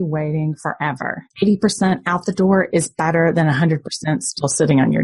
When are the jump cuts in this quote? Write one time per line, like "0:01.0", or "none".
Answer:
0:01.2